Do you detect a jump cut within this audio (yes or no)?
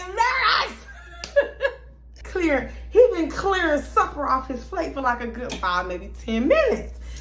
yes